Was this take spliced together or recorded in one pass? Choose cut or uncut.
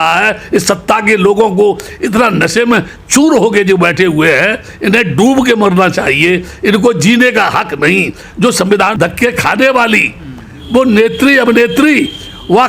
cut